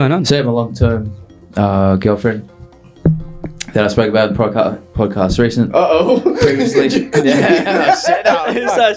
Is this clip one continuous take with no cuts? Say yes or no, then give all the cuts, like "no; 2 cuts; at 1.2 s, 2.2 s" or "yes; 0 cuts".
yes; 0 cuts